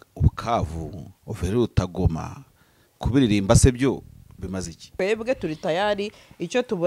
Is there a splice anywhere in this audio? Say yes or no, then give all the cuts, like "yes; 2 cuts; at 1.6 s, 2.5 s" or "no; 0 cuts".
yes; 1 cut; at 4.8 s